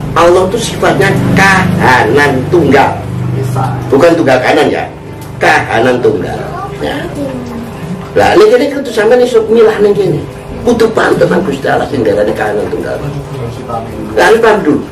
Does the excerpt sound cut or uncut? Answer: uncut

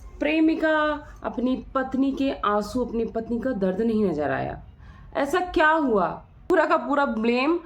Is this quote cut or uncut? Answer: cut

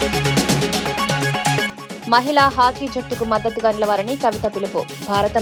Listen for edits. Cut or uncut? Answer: uncut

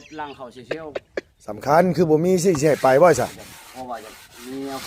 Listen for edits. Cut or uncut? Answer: cut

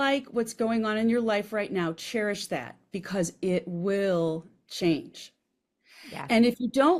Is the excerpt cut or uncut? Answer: uncut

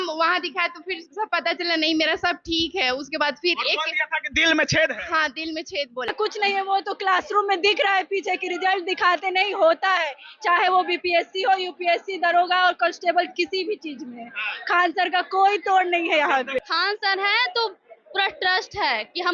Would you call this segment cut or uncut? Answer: cut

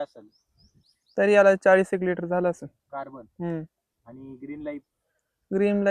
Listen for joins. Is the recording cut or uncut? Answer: uncut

